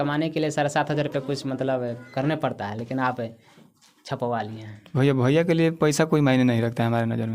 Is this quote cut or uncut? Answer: uncut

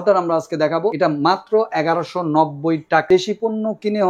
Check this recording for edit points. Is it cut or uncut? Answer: cut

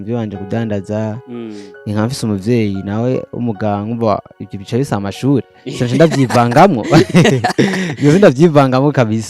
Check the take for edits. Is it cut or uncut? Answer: uncut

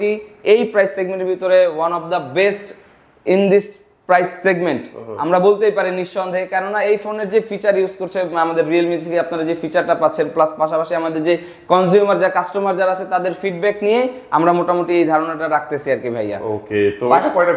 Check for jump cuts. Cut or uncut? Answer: uncut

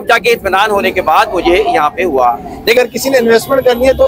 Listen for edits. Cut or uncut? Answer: cut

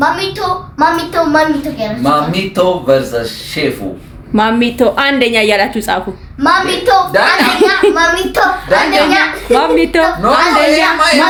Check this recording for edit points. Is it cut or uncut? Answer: uncut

